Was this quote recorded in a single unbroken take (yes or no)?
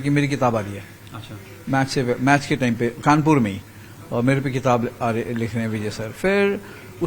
yes